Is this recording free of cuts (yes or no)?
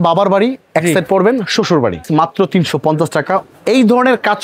no